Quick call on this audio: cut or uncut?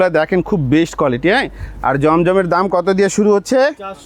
uncut